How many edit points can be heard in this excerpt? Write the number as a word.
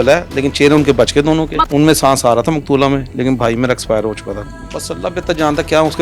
two